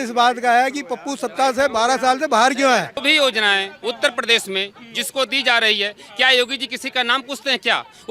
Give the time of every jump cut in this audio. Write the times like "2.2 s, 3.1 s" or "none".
3.0 s